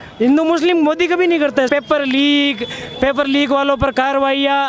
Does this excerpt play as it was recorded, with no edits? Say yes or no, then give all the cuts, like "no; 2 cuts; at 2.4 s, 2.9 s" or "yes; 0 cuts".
no; 1 cut; at 1.7 s